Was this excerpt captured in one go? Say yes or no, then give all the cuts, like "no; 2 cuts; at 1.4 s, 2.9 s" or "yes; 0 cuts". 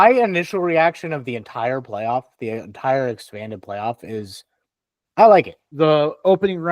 no; 1 cut; at 5.6 s